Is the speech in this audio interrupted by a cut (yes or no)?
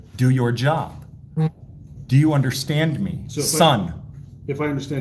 no